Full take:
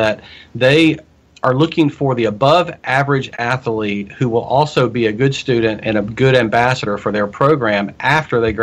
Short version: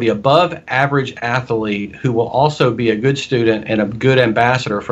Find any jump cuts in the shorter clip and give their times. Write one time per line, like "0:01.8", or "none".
none